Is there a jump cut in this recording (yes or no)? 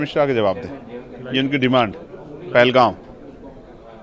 no